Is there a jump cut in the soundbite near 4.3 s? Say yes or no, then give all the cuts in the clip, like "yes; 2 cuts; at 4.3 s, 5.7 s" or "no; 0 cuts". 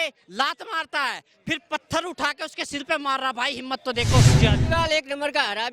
yes; 1 cut; at 4.3 s